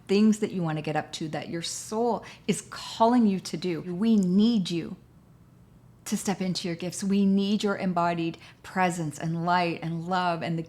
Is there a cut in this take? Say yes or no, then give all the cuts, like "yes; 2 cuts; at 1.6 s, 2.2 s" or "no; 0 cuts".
yes; 1 cut; at 3.9 s